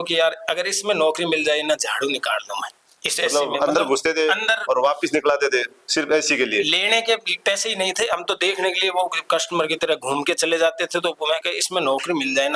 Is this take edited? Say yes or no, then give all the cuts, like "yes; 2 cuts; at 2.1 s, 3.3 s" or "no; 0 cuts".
no; 0 cuts